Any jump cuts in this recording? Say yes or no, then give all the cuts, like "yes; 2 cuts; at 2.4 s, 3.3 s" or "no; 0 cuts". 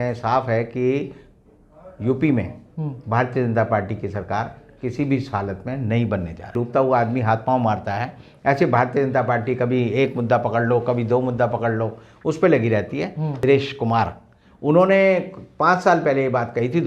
yes; 2 cuts; at 6.5 s, 13.3 s